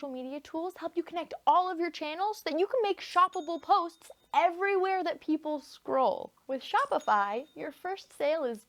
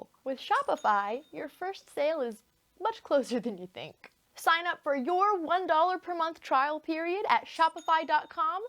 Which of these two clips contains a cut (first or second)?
second